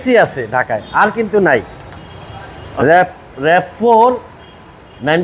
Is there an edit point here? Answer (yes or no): no